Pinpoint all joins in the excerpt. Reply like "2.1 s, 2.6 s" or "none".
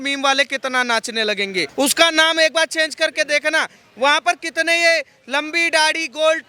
1.7 s